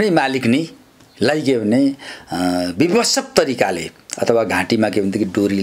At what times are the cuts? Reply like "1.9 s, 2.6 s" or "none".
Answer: none